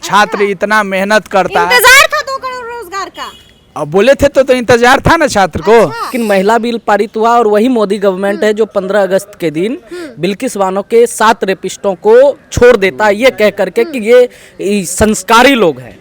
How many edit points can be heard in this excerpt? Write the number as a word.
one